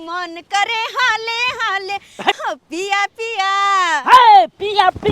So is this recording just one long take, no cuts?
no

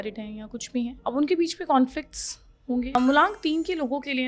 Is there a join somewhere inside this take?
yes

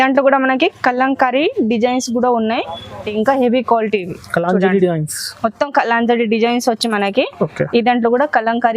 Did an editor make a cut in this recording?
yes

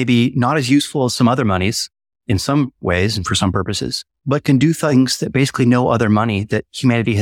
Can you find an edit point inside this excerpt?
yes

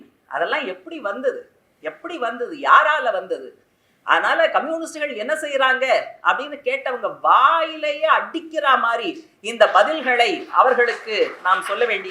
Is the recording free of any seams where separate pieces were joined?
yes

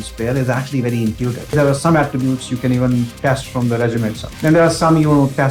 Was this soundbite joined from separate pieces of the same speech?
yes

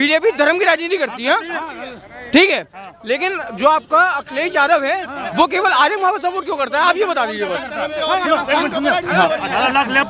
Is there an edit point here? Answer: no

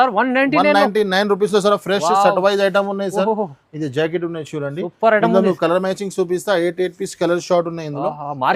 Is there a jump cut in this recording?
no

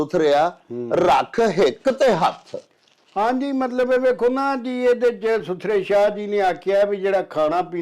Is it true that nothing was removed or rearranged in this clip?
yes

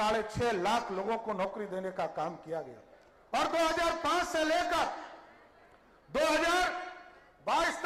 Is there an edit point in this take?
no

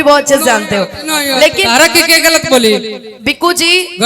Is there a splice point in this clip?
yes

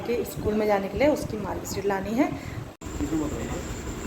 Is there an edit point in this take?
yes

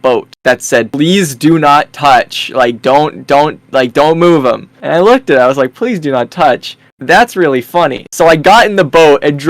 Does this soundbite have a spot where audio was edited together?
no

